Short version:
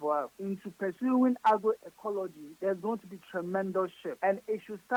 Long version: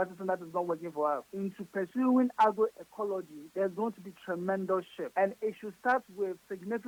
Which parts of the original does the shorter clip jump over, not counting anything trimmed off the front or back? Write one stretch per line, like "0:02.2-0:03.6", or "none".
none